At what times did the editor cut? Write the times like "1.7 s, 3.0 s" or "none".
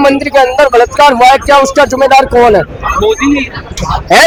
none

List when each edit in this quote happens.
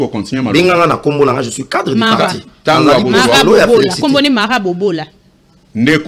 none

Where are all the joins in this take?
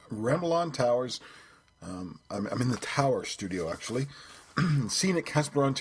3.5 s

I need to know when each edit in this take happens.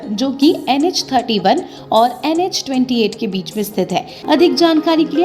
4.1 s

